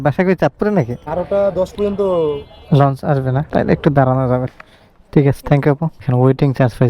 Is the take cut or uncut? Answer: cut